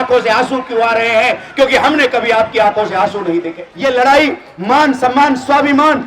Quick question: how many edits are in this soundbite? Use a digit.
1